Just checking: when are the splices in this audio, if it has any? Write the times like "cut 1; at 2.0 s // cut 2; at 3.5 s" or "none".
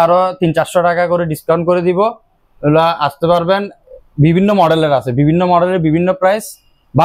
none